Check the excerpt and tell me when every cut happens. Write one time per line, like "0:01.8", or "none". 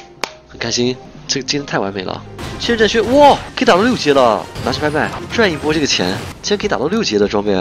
0:02.4
0:03.5
0:05.2